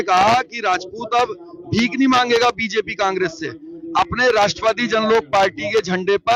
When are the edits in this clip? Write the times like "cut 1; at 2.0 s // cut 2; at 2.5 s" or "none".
none